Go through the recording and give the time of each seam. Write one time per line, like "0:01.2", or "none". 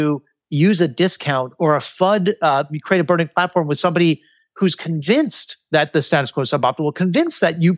0:01.5